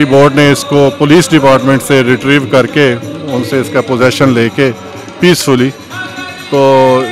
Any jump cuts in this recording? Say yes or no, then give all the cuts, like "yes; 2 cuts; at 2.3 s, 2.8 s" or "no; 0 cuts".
no; 0 cuts